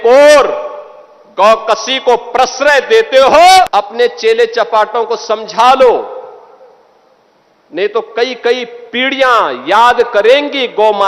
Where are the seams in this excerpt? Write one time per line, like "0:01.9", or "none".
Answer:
0:03.7